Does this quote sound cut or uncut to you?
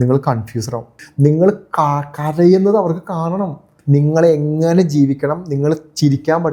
cut